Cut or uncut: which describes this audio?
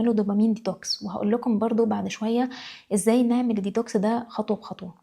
uncut